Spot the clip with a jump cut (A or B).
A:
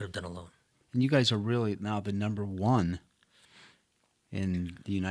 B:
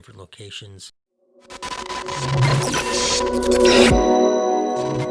B